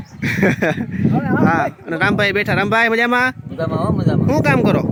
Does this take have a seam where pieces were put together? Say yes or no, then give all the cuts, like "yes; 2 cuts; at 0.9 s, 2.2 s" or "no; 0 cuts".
no; 0 cuts